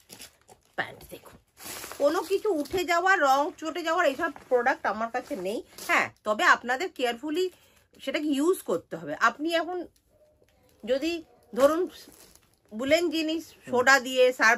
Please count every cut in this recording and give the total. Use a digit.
1